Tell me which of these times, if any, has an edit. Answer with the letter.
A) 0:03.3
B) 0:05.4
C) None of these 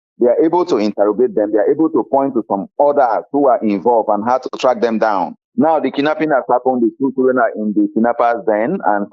B